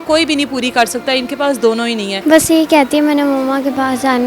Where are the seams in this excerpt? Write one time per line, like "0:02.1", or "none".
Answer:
0:02.1